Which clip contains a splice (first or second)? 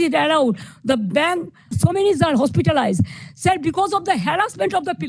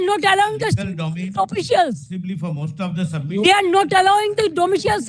first